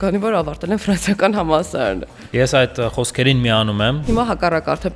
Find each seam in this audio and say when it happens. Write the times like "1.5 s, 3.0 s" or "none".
4.0 s